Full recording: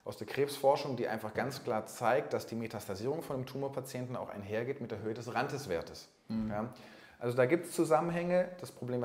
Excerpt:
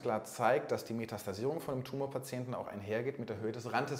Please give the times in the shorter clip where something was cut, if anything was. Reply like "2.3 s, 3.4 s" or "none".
none